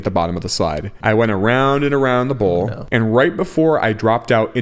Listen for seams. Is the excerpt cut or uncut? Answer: cut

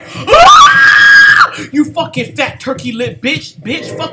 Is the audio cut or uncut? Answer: uncut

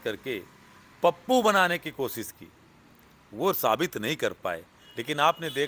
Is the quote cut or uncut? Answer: uncut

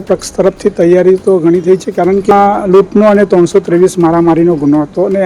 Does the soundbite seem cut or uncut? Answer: cut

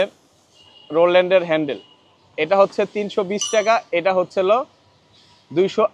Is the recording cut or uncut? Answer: uncut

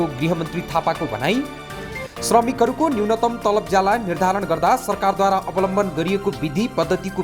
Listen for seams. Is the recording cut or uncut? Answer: uncut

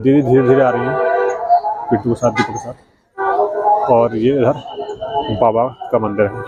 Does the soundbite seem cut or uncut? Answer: uncut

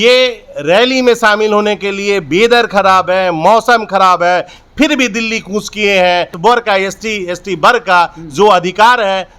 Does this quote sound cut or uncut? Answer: cut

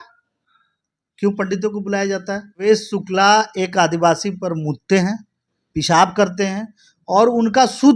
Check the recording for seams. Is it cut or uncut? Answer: cut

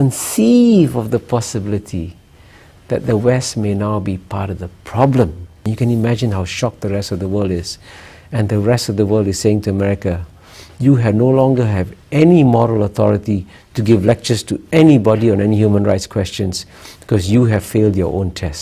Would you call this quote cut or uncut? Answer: cut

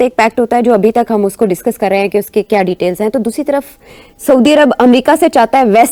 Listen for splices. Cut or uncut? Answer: uncut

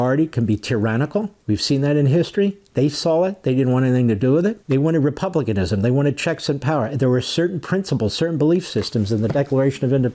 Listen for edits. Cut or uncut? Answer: cut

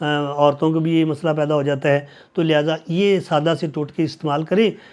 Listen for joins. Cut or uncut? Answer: uncut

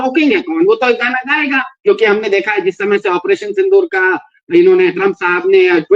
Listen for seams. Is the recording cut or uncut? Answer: cut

